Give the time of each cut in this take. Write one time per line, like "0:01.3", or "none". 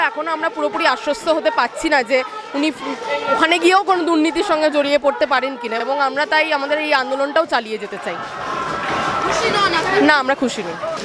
none